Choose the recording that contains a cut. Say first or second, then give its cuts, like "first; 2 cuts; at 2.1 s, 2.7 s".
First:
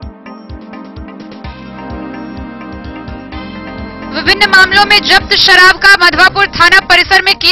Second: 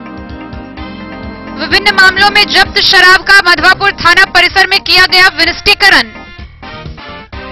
first; 1 cut; at 1.1 s